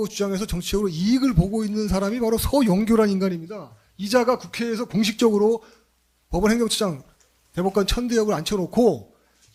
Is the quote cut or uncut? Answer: uncut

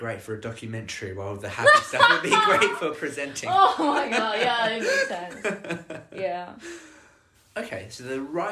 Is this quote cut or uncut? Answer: uncut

